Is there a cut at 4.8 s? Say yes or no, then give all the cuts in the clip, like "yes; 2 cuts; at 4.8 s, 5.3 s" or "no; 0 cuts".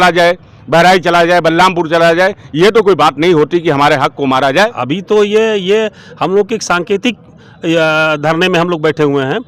yes; 1 cut; at 4.8 s